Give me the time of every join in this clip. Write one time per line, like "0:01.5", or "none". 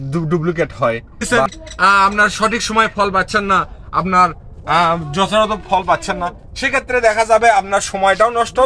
0:01.3